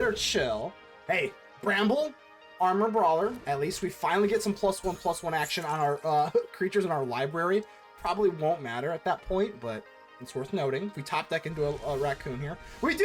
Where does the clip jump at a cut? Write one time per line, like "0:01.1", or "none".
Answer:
0:01.5